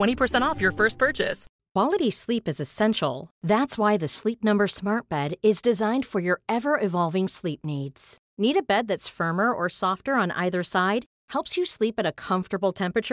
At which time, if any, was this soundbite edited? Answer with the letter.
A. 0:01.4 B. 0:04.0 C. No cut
A